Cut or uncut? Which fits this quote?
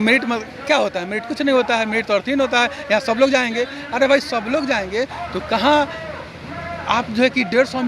uncut